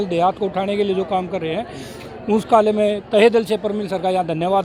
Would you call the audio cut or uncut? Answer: uncut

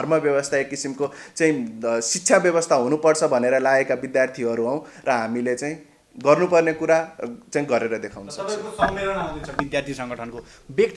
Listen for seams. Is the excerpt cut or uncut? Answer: uncut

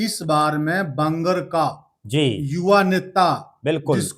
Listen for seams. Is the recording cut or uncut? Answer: uncut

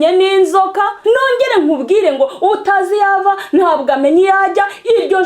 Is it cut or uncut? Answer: cut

